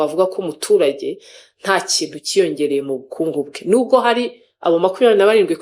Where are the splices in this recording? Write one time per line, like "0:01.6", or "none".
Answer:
none